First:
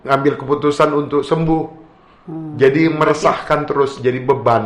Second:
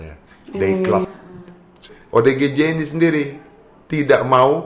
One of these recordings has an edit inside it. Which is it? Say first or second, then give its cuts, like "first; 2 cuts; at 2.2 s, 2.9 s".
second; 1 cut; at 1.0 s